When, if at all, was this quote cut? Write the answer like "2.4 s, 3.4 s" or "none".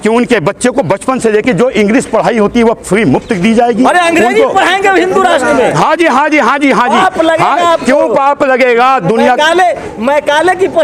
none